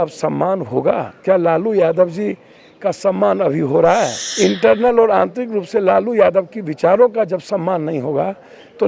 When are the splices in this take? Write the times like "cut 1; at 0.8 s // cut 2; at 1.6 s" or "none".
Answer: cut 1; at 4.2 s